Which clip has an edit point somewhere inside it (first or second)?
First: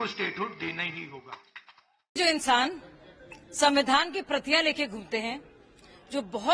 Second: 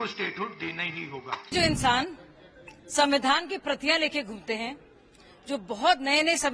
second